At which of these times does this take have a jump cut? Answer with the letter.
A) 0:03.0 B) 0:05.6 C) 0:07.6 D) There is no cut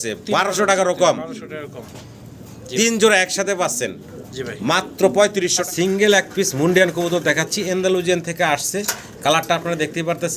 B